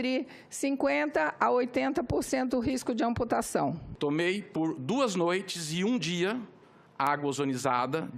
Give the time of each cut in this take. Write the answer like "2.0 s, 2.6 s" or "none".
3.9 s